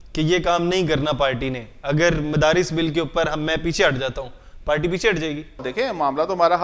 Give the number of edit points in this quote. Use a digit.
1